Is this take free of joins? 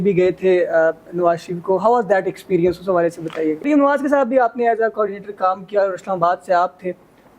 no; 1 cut; at 3.7 s

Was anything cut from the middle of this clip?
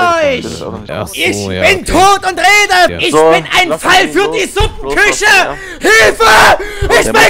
yes; 2 cuts; at 0.9 s, 3.0 s

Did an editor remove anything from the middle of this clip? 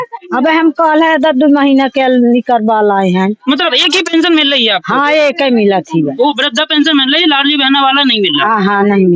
no; 0 cuts

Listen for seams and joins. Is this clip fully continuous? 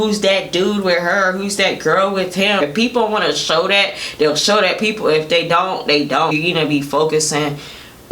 no; 2 cuts; at 2.6 s, 6.3 s

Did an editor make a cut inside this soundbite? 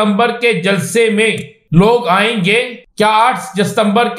yes; 2 cuts; at 1.5 s, 2.8 s

